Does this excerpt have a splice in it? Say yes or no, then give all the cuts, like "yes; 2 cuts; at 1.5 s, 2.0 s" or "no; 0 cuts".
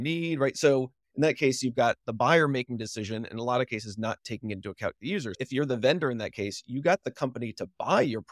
no; 0 cuts